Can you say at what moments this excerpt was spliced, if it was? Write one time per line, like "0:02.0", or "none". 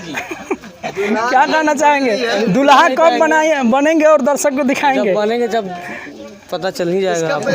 none